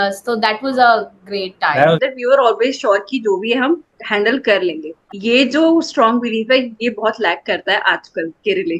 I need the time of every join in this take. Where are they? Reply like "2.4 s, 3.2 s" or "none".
2.0 s, 4.9 s